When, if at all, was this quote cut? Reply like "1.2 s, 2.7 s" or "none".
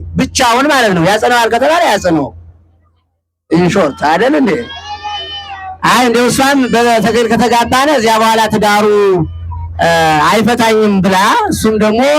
none